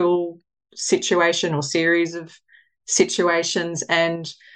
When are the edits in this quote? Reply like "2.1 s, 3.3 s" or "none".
none